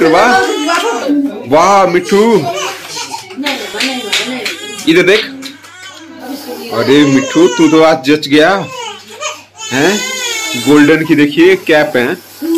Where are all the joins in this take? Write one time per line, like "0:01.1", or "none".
0:01.0

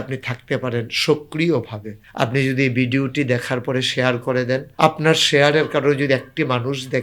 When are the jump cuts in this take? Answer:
0:04.7

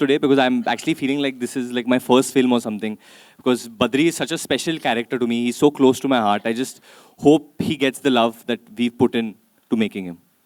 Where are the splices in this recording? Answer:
none

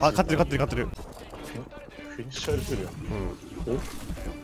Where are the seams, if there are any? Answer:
0:01.0

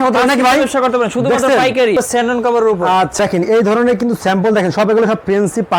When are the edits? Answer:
0:02.0
0:03.2

